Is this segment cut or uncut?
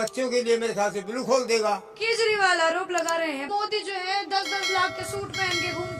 cut